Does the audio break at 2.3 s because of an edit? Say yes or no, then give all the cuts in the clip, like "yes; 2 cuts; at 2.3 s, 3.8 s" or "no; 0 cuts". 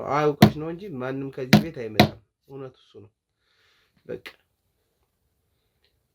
no; 0 cuts